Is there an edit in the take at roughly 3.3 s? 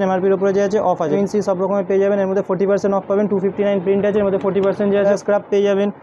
no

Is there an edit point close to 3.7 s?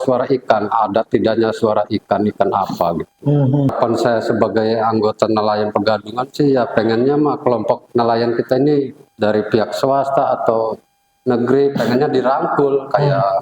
yes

